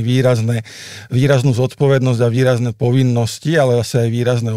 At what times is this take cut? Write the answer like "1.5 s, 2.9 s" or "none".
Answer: none